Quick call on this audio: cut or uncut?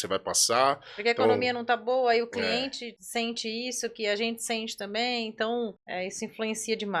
cut